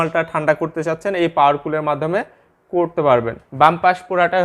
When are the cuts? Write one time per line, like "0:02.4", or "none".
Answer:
0:03.4